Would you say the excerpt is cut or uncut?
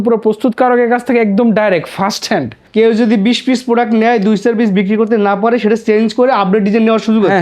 cut